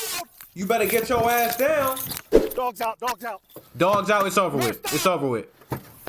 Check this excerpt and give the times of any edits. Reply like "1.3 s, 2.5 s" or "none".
2.3 s